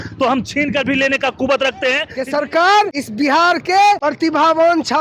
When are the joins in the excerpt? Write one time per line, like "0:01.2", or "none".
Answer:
0:02.1
0:03.0
0:04.1